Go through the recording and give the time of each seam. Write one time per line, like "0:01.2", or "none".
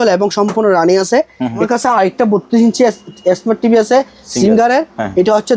0:01.6